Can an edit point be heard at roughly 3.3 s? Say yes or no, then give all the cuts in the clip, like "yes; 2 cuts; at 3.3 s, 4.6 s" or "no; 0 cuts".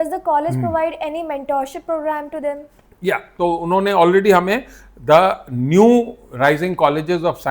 yes; 1 cut; at 3.3 s